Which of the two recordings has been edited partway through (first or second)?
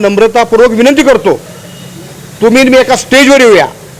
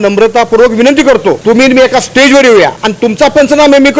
second